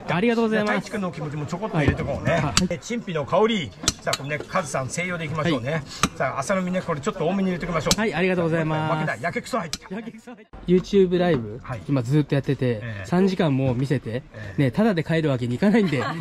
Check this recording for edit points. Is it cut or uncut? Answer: cut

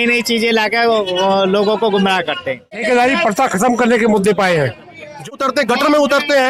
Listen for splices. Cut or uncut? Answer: cut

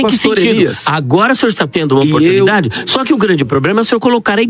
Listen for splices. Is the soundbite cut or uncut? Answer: uncut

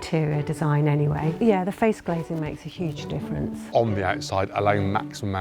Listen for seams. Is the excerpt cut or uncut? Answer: cut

